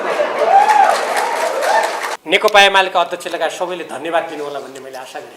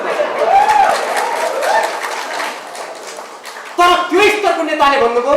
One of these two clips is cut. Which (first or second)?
first